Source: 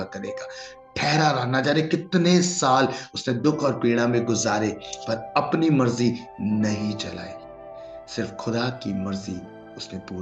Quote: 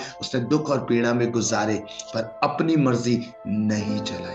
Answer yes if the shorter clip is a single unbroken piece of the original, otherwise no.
yes